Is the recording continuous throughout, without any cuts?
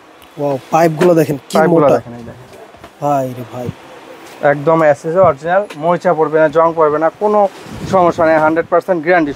yes; 0 cuts

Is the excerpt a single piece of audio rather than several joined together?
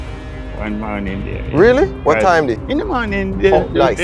no; 2 cuts; at 2.0 s, 2.6 s

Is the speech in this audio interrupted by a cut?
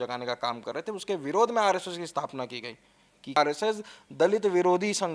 yes; 1 cut; at 3.4 s

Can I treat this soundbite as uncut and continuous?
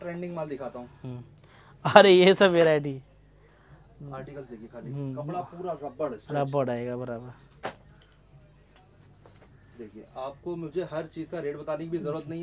yes; 0 cuts

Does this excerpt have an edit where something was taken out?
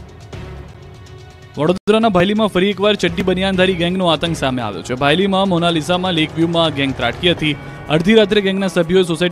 no; 0 cuts

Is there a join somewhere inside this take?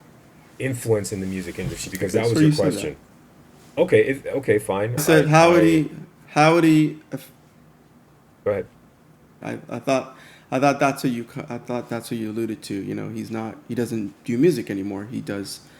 yes; 1 cut; at 9.4 s

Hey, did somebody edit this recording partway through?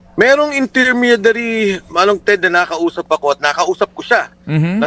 no; 0 cuts

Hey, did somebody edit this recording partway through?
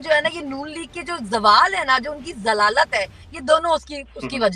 no; 0 cuts

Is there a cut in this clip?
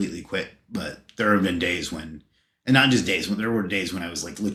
no; 0 cuts

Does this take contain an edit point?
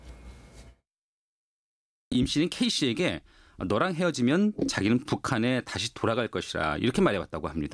no; 0 cuts

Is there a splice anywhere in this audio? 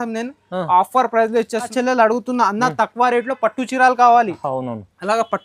yes; 1 cut; at 1.7 s

